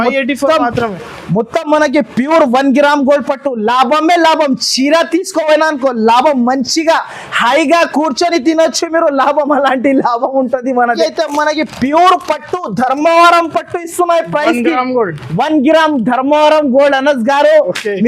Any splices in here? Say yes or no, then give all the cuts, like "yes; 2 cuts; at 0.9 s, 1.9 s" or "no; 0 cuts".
yes; 1 cut; at 11.0 s